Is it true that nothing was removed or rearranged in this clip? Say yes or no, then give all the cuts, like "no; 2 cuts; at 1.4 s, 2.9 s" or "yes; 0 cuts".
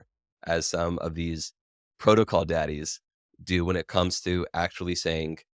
yes; 0 cuts